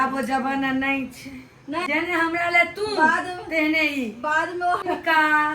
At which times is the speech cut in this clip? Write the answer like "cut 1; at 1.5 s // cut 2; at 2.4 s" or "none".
cut 1; at 1.9 s // cut 2; at 4.8 s